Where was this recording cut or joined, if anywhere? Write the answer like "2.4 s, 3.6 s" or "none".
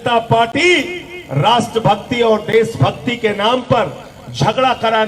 none